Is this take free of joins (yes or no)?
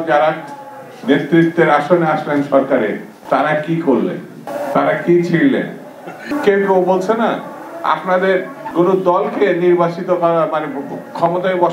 no